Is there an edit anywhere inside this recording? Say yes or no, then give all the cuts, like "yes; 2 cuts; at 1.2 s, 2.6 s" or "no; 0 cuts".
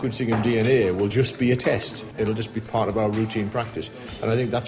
yes; 1 cut; at 1.1 s